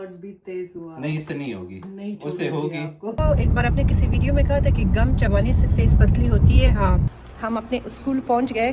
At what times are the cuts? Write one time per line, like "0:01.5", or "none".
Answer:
0:03.2
0:07.0